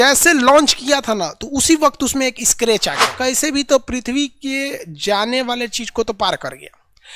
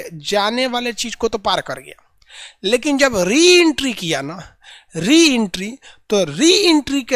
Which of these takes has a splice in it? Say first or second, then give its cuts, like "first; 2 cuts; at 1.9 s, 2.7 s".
first; 1 cut; at 3.1 s